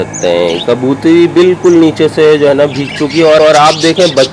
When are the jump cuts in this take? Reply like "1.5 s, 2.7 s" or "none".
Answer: none